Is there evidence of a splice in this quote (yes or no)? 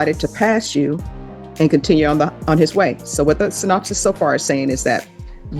no